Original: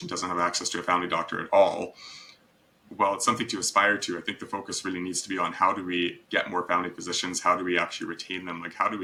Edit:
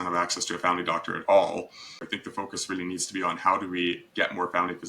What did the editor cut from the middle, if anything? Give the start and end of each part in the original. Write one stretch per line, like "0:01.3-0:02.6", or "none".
0:02.4-0:04.3